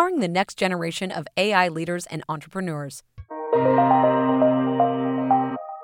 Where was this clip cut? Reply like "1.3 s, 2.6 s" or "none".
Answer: 3.4 s